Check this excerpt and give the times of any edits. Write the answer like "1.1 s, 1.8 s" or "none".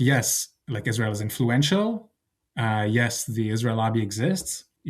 none